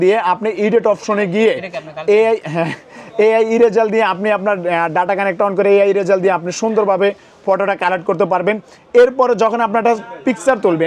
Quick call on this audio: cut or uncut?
uncut